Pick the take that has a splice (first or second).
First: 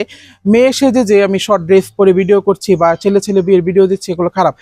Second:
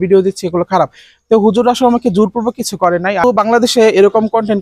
second